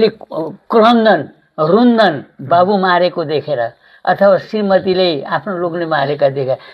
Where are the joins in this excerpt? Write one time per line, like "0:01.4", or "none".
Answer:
none